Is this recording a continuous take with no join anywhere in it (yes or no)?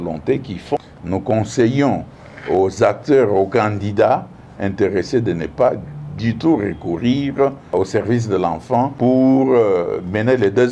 no